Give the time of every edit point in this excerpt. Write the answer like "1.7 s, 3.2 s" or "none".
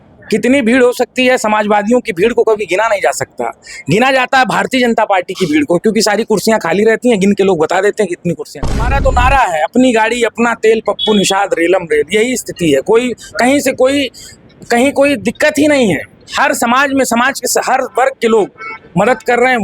8.6 s